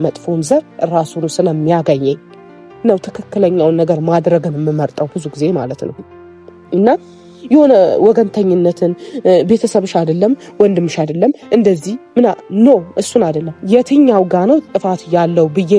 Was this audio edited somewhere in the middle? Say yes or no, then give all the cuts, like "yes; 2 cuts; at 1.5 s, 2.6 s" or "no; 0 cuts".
no; 0 cuts